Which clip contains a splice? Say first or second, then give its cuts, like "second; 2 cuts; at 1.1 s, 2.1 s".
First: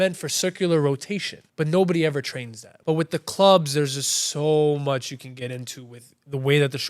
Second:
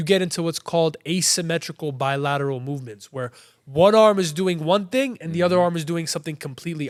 first; 2 cuts; at 1.4 s, 2.7 s